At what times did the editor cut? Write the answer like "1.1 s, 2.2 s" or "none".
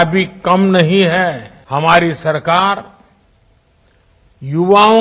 1.5 s